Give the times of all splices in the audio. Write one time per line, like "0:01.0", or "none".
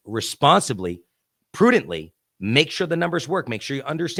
none